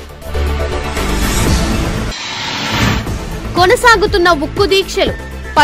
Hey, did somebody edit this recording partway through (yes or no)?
yes